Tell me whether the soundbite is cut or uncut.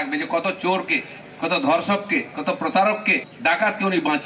cut